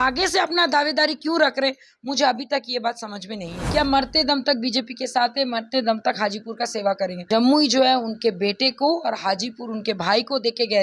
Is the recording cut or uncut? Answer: cut